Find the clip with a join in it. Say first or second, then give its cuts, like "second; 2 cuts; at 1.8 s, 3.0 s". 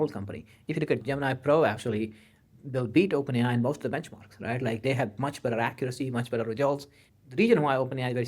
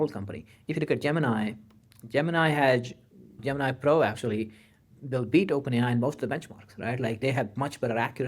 first; 2 cuts; at 1.0 s, 7.0 s